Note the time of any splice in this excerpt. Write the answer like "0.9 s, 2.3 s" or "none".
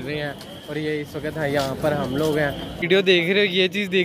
2.8 s